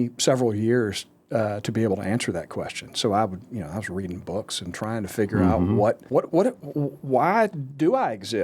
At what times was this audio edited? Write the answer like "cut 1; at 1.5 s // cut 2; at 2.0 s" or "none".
cut 1; at 6.0 s